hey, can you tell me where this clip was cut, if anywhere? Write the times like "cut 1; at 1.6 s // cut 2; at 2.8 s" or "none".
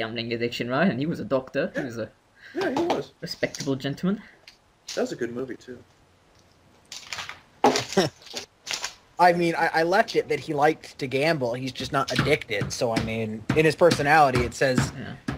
none